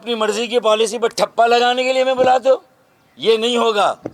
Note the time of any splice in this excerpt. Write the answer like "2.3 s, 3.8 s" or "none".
none